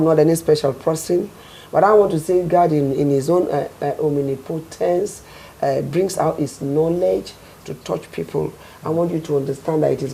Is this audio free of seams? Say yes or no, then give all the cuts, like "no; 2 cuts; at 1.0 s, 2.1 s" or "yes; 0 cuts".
yes; 0 cuts